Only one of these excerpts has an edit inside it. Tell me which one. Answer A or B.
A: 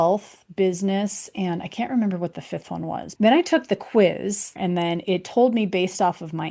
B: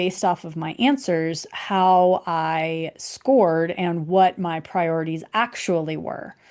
A